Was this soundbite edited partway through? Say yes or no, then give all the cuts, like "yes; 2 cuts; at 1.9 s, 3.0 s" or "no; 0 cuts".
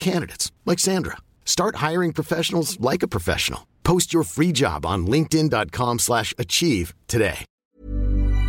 yes; 1 cut; at 7.5 s